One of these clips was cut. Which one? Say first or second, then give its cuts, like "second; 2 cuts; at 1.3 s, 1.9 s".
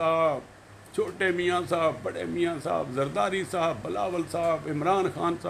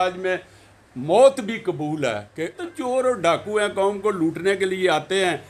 second; 1 cut; at 2.6 s